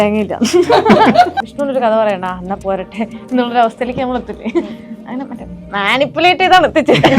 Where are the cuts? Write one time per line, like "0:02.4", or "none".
0:01.4

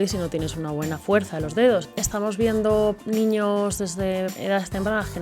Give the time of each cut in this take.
0:02.0
0:03.0
0:04.4

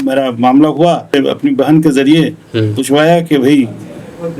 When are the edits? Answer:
0:01.1

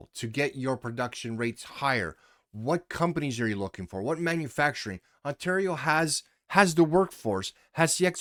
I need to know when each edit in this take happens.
none

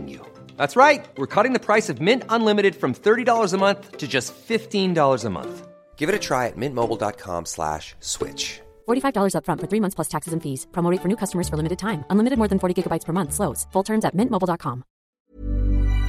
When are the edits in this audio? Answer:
0:15.0

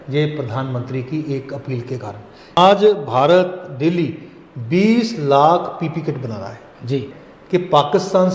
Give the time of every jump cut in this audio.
0:02.6
0:07.1

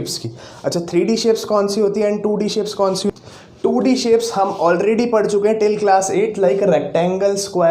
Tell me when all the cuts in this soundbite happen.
0:03.1

